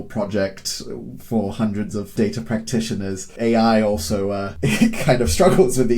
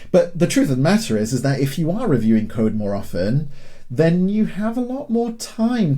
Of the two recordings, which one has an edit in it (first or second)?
first